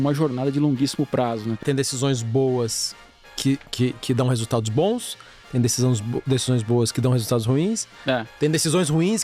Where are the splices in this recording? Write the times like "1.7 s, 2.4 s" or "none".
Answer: 1.6 s